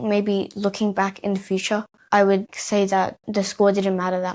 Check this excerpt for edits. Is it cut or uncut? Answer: cut